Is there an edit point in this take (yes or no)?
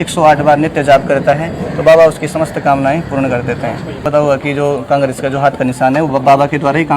yes